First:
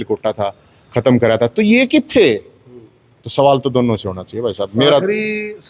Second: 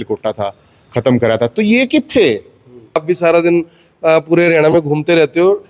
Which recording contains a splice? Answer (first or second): second